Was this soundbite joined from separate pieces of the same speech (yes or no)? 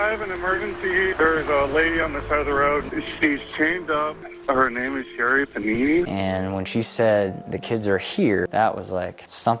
yes